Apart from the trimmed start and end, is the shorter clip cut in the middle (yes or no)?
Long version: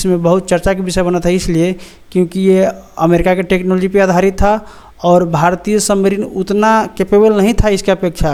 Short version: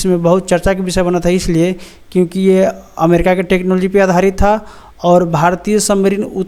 no